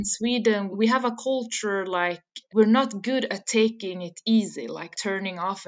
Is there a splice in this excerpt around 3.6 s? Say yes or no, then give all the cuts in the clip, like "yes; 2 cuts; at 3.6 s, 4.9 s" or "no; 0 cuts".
no; 3 cuts; at 0.7 s, 2.3 s, 4.9 s